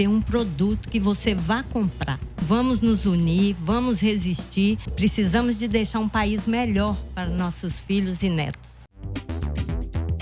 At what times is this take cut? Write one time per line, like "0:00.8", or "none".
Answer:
0:02.4
0:04.9
0:09.1